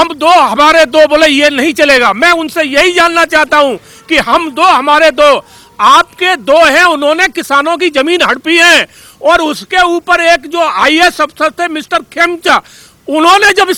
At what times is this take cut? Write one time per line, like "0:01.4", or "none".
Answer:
none